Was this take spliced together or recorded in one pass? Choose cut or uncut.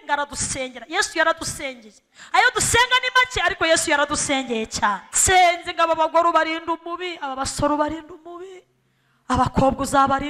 cut